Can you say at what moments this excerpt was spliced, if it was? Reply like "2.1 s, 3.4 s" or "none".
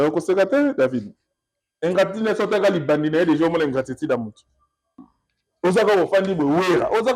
4.9 s